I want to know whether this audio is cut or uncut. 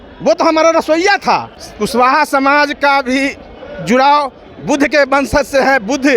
cut